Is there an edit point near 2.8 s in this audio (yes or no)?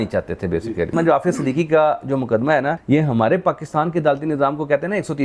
yes